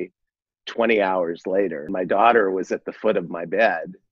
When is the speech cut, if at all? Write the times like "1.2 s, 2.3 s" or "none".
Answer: 1.9 s